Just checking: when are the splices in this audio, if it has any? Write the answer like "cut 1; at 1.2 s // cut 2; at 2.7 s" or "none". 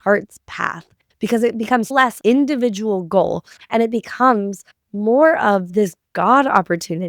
cut 1; at 1.0 s // cut 2; at 1.9 s // cut 3; at 3.5 s